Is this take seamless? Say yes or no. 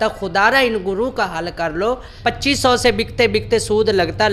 no